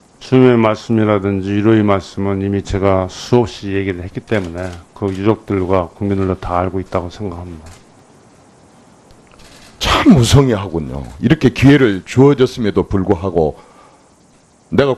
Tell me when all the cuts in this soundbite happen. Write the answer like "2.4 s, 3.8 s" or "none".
2.8 s